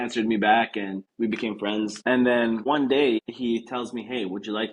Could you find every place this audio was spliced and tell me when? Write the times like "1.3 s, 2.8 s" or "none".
1.0 s, 2.0 s, 2.6 s, 3.3 s